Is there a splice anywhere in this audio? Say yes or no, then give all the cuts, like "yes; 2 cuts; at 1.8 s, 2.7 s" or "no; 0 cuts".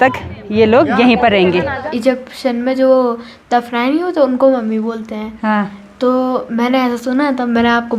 yes; 1 cut; at 1.9 s